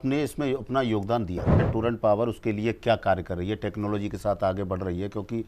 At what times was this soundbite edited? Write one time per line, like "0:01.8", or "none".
0:01.7